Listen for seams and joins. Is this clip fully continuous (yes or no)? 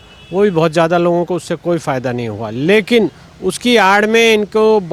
yes